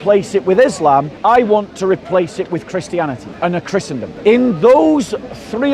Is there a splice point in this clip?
yes; 3 cuts; at 1.1 s, 3.3 s, 4.1 s

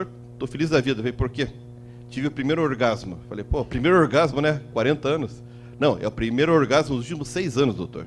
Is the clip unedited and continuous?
yes; 0 cuts

